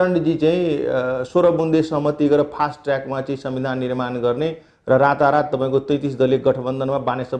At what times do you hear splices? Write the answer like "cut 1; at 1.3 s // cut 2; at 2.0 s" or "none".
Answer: none